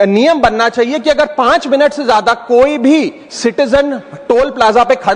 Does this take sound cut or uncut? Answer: uncut